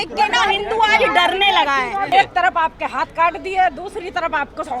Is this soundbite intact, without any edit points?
no; 1 cut; at 2.1 s

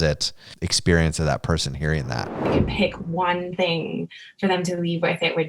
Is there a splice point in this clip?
yes; 1 cut; at 2.5 s

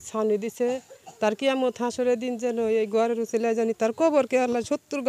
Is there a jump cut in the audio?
no; 0 cuts

